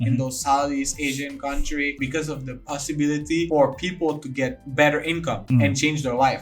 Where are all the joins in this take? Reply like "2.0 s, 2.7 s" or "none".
1.9 s, 3.5 s, 4.6 s, 5.4 s